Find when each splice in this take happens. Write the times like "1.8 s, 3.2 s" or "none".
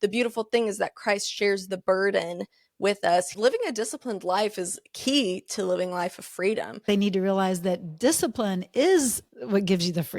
3.3 s, 6.8 s